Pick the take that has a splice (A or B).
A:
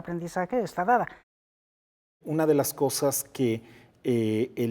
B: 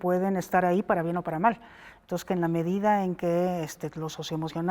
A